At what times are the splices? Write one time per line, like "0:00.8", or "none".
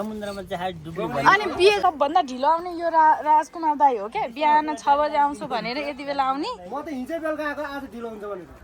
0:01.8

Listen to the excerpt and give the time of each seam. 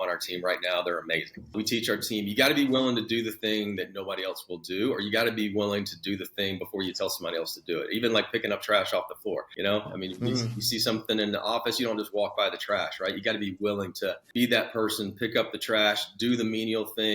0:01.5
0:09.5
0:14.2

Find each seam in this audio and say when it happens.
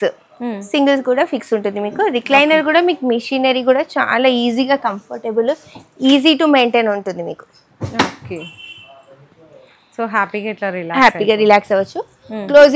none

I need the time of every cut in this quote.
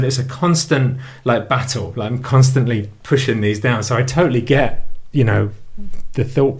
none

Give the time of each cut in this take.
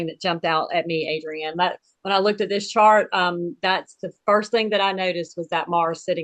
none

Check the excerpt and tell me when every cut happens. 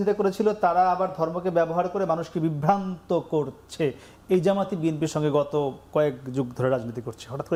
none

